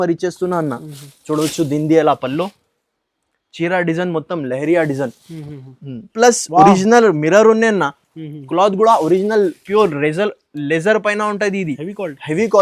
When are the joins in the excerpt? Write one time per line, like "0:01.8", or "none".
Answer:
0:06.1